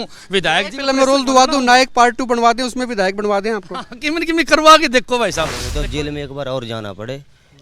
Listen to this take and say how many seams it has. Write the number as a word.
one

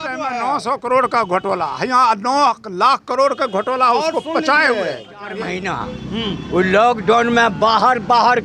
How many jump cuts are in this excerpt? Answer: one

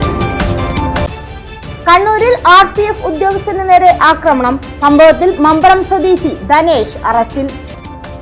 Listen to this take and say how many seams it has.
one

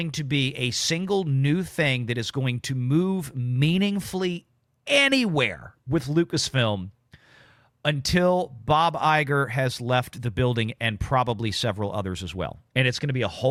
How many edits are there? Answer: zero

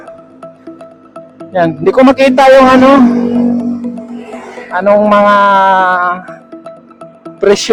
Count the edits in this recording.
zero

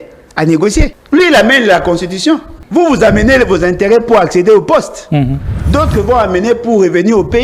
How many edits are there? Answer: two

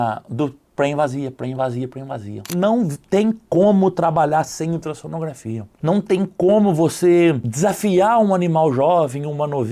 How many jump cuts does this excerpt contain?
two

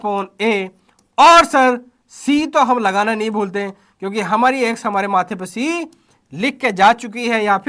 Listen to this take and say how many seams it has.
zero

